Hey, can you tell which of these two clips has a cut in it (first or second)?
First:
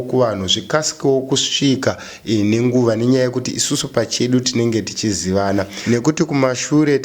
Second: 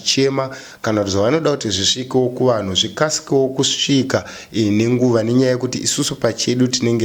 first